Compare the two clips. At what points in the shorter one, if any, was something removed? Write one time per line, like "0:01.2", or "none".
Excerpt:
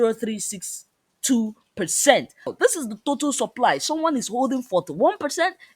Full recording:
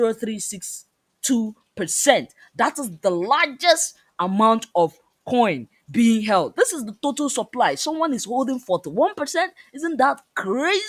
0:02.5